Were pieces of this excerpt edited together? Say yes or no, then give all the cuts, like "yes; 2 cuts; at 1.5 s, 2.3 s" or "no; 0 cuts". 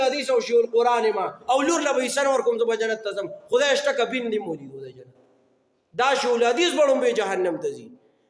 no; 0 cuts